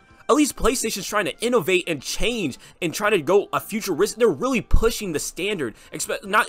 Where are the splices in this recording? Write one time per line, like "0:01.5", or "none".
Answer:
none